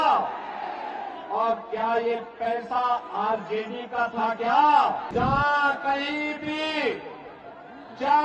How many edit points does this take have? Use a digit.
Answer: 1